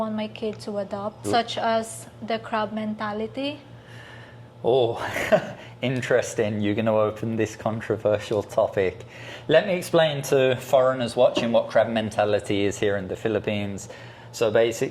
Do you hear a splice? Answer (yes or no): no